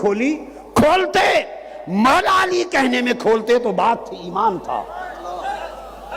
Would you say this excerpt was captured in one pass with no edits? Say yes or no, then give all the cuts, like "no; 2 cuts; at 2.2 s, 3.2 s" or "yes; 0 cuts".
yes; 0 cuts